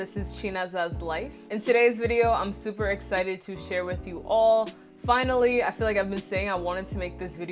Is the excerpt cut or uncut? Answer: cut